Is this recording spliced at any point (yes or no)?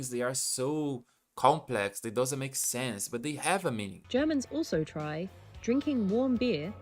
yes